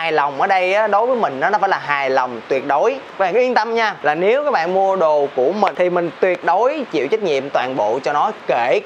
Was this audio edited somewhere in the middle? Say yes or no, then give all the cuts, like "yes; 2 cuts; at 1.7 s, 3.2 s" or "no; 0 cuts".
yes; 3 cuts; at 3.1 s, 4.0 s, 5.7 s